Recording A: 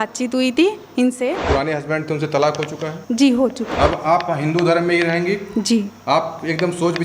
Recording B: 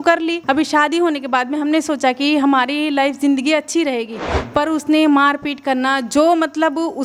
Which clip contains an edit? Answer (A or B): A